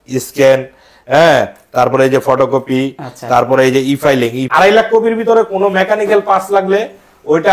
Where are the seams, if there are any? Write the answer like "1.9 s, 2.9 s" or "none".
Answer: 4.5 s